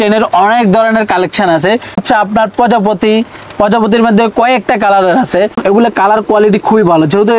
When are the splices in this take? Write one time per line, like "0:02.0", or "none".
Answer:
0:02.0
0:05.6